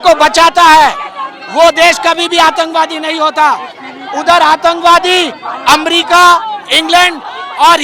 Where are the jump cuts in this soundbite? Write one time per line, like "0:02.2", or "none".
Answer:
none

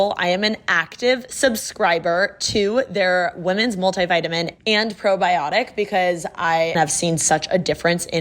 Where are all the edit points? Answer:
0:06.7

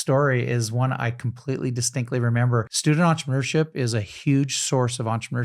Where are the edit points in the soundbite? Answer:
0:02.7

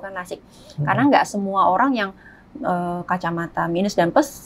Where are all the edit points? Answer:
none

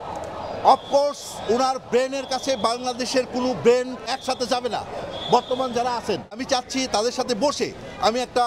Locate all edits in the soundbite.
0:04.1
0:06.4

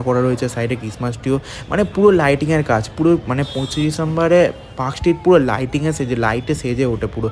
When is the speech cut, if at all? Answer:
none

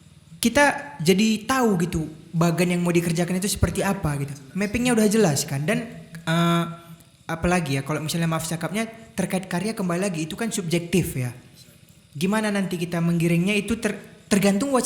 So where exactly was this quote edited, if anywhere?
none

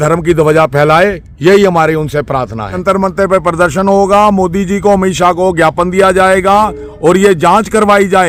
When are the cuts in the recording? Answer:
none

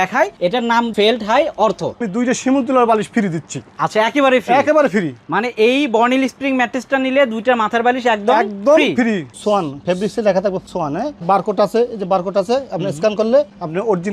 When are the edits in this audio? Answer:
0:00.9
0:02.1
0:09.3
0:11.2

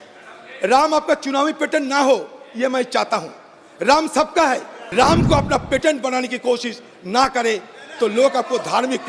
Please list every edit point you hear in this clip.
0:04.8

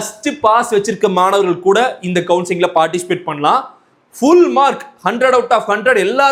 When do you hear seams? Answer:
none

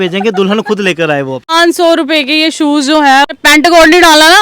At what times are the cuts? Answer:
0:01.5
0:03.3

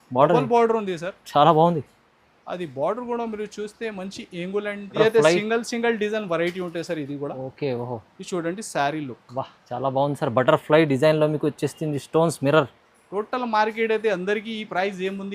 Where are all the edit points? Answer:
0:05.0

